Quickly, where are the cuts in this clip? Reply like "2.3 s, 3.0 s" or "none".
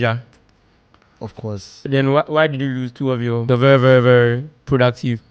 1.8 s, 3.4 s